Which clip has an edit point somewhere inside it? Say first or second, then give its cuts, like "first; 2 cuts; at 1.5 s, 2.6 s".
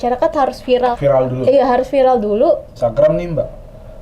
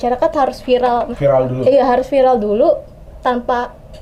first; 2 cuts; at 1.0 s, 2.7 s